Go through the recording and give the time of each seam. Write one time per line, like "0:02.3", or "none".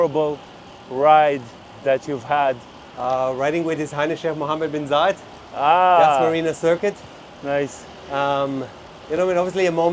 none